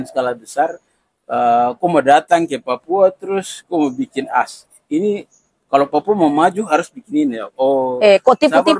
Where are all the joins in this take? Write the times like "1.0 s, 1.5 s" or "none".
none